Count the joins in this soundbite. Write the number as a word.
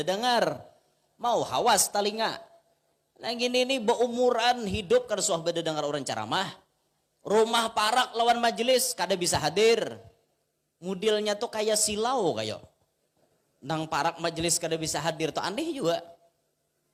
zero